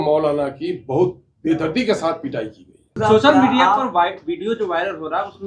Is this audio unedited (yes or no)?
no